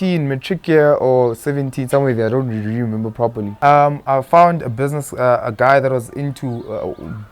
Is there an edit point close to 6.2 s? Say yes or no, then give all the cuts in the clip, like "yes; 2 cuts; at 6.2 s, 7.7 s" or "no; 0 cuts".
no; 1 cut; at 3.5 s